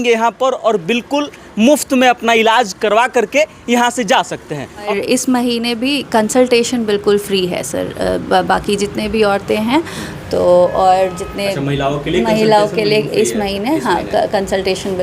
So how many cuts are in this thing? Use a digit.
1